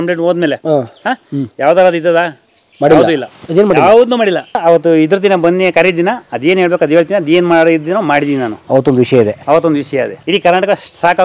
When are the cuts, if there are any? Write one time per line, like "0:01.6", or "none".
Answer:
0:04.6
0:08.6
0:10.2